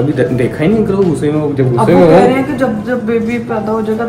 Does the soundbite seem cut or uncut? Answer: uncut